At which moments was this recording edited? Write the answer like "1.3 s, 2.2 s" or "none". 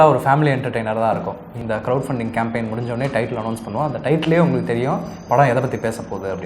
1.5 s